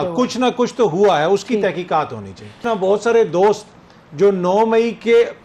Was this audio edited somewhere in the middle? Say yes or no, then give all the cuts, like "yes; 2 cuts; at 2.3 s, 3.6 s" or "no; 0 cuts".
yes; 1 cut; at 2.6 s